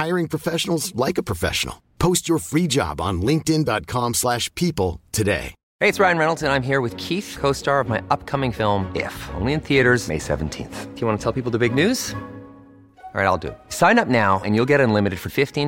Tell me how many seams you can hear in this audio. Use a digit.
1